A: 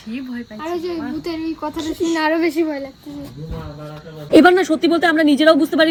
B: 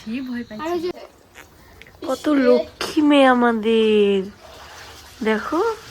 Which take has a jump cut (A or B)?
B